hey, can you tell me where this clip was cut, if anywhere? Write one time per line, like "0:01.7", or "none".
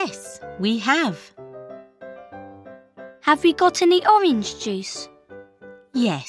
0:01.4
0:02.8